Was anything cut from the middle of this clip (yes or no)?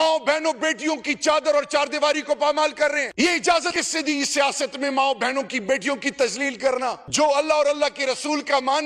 yes